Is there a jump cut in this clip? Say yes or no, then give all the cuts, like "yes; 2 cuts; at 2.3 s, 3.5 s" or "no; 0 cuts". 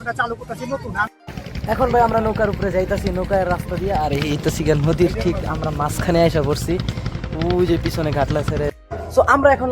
yes; 2 cuts; at 1.1 s, 8.8 s